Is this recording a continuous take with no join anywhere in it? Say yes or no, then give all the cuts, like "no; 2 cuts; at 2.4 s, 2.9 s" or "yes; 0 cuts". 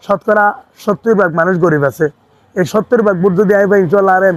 yes; 0 cuts